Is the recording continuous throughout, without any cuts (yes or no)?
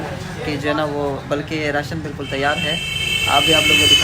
yes